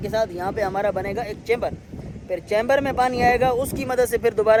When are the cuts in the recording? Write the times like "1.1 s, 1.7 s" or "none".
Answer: none